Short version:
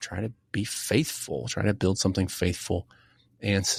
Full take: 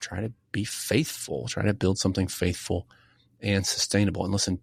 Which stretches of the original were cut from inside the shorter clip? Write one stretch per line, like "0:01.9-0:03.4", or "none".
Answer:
none